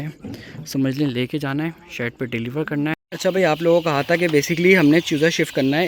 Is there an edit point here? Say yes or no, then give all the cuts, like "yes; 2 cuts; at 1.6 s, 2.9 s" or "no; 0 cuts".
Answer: yes; 1 cut; at 2.9 s